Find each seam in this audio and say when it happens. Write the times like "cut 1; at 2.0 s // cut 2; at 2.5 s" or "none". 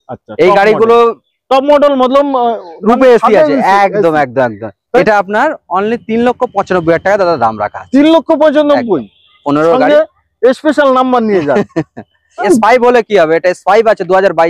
cut 1; at 5.0 s // cut 2; at 12.4 s